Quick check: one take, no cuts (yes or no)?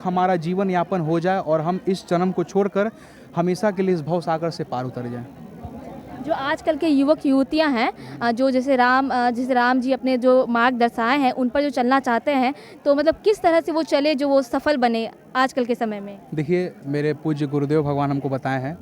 yes